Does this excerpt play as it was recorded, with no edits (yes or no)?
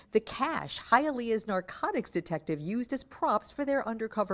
yes